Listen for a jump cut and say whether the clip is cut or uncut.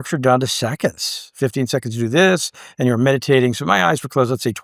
uncut